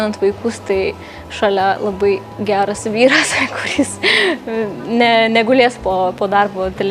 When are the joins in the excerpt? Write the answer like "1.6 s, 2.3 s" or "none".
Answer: none